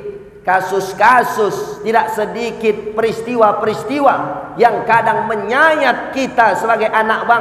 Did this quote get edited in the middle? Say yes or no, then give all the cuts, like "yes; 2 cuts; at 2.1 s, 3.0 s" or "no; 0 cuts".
no; 0 cuts